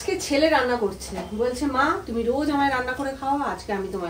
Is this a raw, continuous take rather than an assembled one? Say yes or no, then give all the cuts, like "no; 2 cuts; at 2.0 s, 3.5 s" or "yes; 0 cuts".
yes; 0 cuts